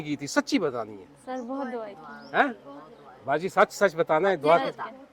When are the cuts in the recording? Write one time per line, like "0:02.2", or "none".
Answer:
none